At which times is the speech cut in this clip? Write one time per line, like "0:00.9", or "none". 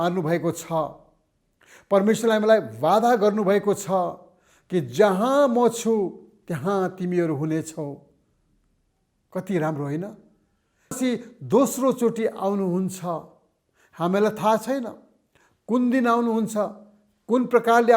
0:11.0